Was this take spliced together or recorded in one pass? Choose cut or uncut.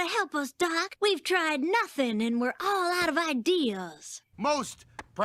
cut